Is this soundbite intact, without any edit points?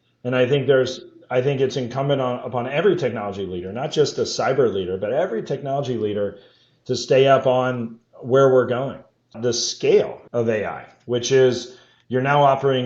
no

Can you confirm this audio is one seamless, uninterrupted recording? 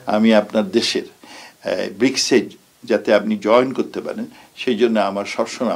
yes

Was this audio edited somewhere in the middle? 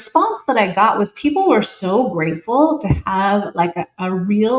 no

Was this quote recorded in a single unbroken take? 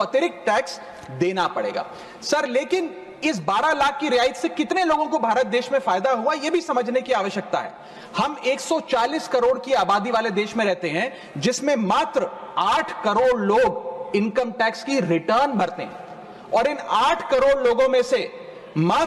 yes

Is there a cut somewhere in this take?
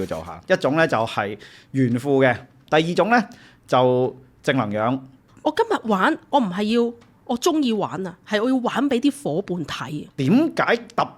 yes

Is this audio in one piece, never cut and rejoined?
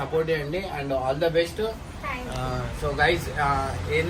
yes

